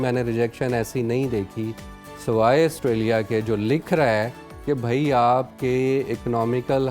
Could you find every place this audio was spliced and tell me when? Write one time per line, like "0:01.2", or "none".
none